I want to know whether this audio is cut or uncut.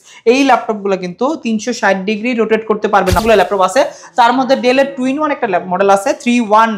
cut